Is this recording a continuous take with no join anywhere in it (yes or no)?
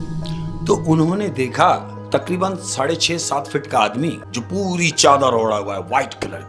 no